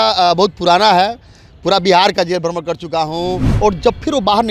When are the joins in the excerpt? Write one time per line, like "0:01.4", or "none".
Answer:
0:03.5